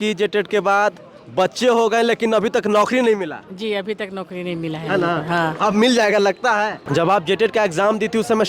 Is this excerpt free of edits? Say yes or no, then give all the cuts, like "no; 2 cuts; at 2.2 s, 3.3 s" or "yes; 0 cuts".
no; 1 cut; at 6.8 s